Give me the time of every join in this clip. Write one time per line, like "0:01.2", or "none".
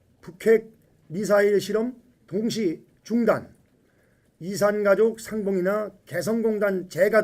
0:02.6

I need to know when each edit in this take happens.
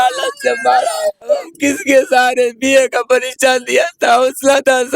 0:01.5

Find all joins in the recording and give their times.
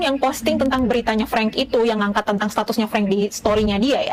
none

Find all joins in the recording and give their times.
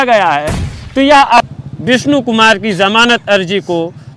0:01.4

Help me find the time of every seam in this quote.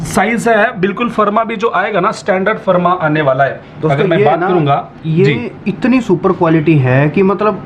none

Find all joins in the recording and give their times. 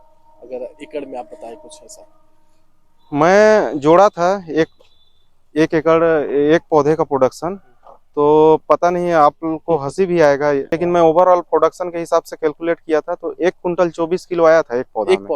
0:10.7

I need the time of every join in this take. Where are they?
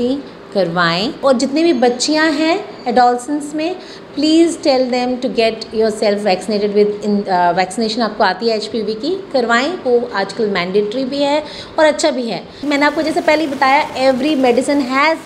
0:01.2
0:12.5

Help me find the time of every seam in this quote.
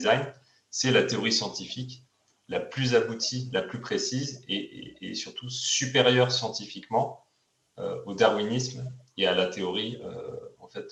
none

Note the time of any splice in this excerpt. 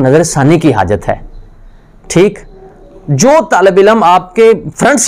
none

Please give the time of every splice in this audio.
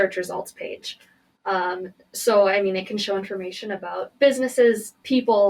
none

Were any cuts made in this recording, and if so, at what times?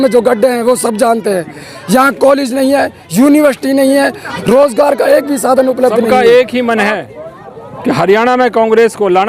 0:04.2
0:06.1

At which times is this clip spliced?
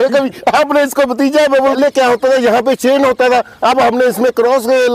0:01.8

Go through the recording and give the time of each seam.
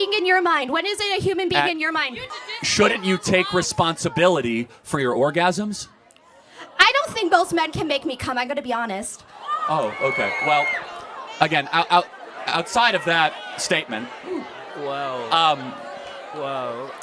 0:02.2

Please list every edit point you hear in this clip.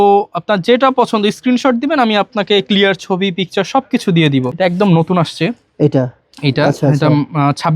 0:04.5

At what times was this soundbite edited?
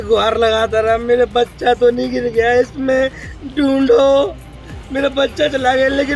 none

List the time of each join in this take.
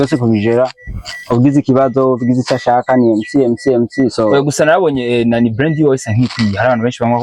none

